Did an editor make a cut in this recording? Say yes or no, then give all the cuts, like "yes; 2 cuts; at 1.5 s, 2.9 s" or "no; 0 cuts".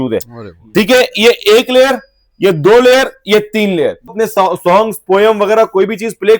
yes; 1 cut; at 4.1 s